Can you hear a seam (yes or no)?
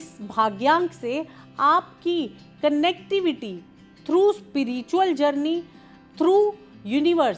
no